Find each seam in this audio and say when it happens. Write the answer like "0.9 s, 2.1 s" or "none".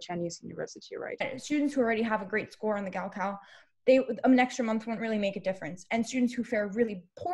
1.3 s